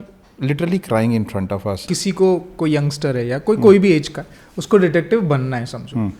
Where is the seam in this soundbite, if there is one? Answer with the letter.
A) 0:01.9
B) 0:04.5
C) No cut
A